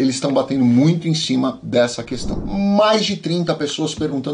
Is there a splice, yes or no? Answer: yes